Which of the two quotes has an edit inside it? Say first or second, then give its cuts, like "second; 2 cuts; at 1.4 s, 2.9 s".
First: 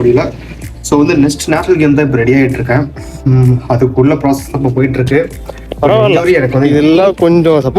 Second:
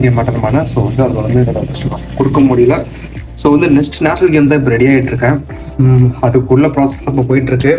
first; 1 cut; at 6.7 s